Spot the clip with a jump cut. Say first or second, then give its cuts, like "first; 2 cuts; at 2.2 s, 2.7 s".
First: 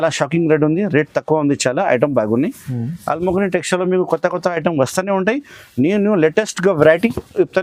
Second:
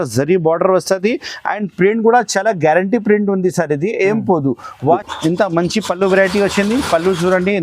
second; 1 cut; at 5.1 s